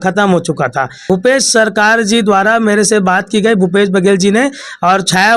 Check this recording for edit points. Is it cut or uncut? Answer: cut